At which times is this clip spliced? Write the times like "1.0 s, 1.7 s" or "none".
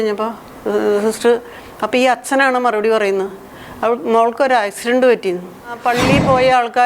5.8 s